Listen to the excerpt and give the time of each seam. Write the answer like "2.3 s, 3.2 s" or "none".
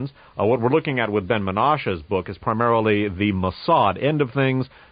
1.5 s